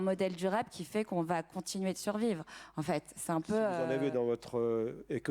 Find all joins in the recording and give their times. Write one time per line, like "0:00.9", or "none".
0:03.8